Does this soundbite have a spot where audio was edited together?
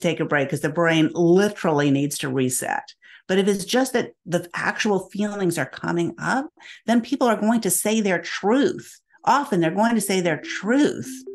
no; 0 cuts

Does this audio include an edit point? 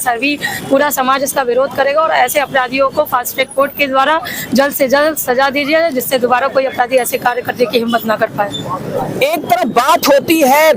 no; 0 cuts

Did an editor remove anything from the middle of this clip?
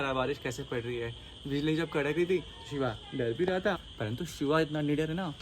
yes; 1 cut; at 3.9 s

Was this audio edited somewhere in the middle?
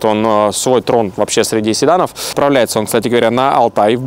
yes; 1 cut; at 2.3 s

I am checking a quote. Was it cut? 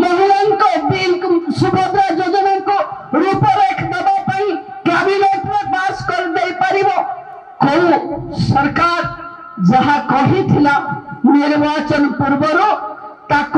no; 0 cuts

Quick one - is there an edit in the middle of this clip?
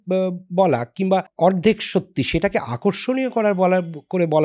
yes; 1 cut; at 1.3 s

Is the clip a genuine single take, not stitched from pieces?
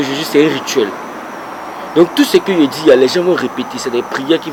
yes; 0 cuts

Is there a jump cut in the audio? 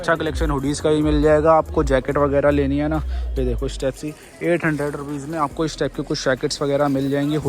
no; 0 cuts

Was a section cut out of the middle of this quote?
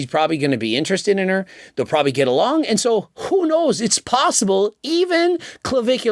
no; 0 cuts

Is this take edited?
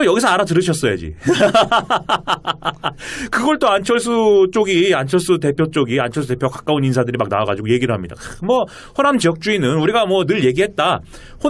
yes; 1 cut; at 7.5 s

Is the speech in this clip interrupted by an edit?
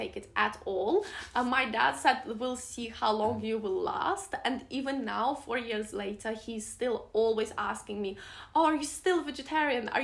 no; 0 cuts

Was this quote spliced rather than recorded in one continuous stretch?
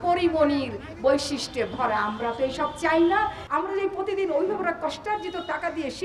yes; 1 cut; at 3.4 s

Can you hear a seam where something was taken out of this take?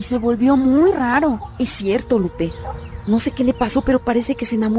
no; 0 cuts

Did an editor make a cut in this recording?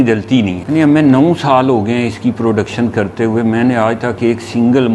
no; 0 cuts

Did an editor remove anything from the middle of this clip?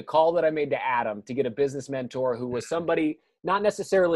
no; 0 cuts

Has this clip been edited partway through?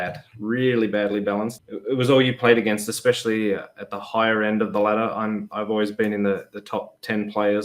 yes; 1 cut; at 1.5 s

